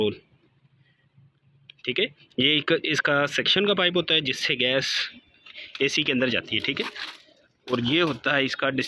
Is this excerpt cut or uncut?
uncut